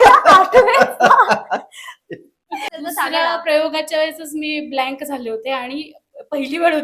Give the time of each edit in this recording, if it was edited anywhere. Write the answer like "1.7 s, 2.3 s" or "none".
2.7 s